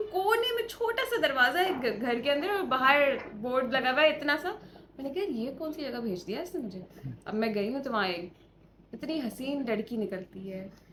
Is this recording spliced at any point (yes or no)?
no